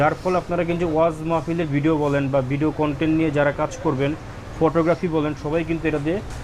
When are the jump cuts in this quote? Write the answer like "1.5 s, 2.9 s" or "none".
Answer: none